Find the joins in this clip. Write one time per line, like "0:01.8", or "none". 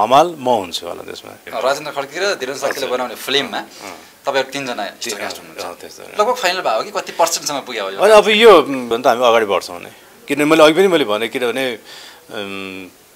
0:01.4
0:09.0